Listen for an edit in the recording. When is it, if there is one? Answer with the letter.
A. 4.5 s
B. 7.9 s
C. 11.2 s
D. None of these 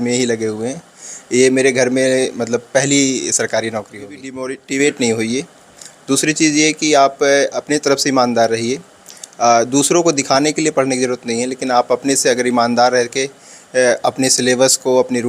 A